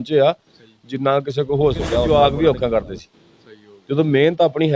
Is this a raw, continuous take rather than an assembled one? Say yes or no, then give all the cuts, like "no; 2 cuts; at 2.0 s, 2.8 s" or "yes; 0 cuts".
no; 1 cut; at 2.1 s